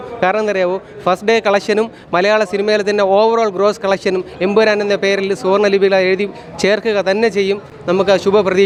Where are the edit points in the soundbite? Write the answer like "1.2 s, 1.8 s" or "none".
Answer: none